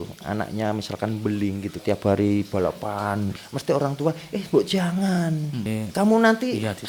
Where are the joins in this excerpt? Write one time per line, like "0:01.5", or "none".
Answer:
0:01.8
0:03.3
0:05.7